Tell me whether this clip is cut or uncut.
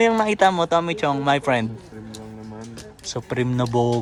uncut